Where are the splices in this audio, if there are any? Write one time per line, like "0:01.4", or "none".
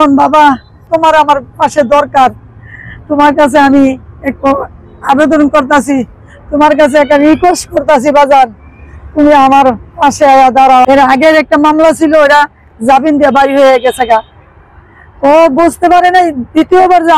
0:00.9
0:10.9